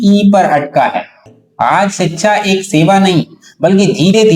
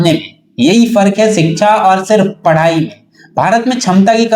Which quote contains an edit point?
first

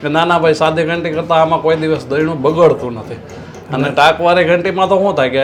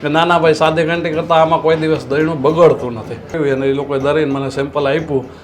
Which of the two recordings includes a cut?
second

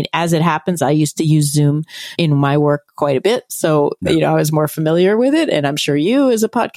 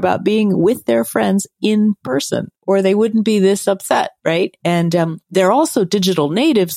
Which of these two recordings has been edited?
first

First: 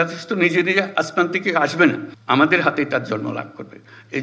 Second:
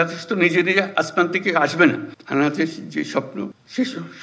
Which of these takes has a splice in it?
second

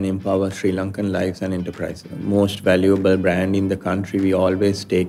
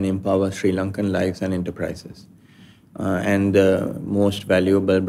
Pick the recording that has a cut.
first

